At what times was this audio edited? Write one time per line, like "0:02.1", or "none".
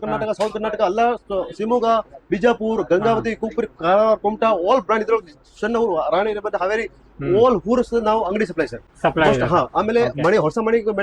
none